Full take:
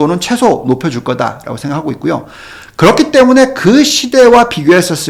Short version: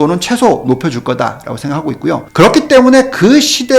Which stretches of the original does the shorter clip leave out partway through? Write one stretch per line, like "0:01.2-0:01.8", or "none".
0:02.3-0:02.7

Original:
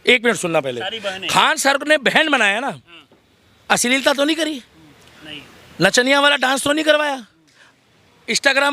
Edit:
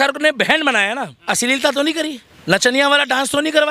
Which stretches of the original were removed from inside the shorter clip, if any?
0:02.8-0:03.6
0:04.7-0:05.6

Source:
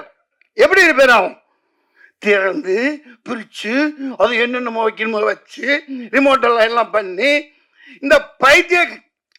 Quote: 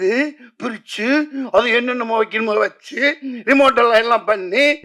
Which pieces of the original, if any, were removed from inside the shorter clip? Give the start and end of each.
none

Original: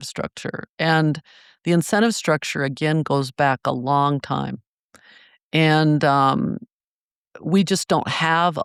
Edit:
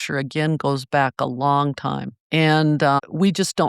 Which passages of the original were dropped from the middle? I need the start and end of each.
0:04.6-0:05.3
0:06.2-0:07.3

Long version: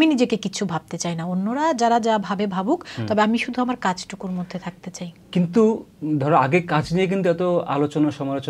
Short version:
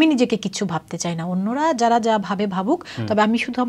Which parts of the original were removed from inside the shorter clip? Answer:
none

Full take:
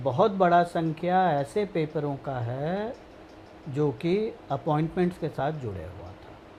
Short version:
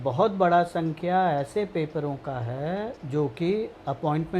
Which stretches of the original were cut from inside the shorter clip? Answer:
0:03.0-0:03.6

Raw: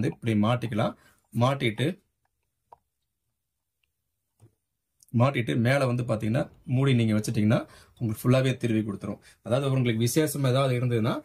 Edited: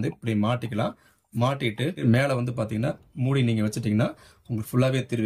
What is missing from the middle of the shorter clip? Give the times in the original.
0:02.0-0:05.5

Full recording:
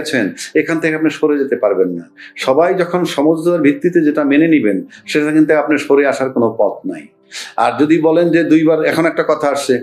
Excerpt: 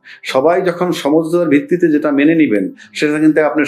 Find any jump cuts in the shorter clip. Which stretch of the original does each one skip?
none

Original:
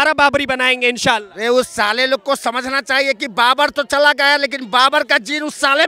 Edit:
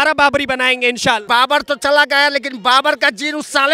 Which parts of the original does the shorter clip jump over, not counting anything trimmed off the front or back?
0:01.2-0:03.3

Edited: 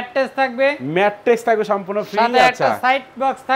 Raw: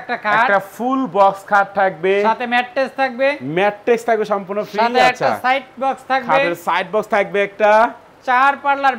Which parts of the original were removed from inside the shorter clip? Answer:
none

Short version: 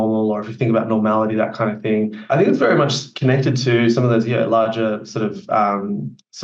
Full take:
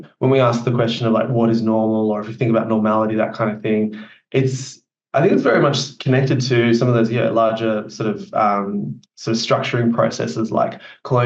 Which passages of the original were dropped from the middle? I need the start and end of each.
0:04.0-0:05.0

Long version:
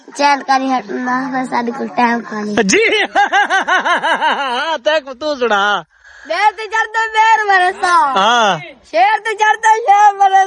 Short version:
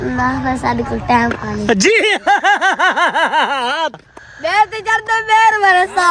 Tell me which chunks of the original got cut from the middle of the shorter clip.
0:04.8-0:05.8

